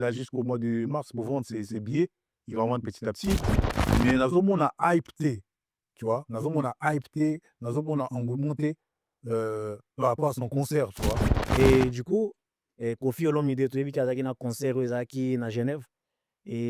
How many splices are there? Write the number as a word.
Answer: one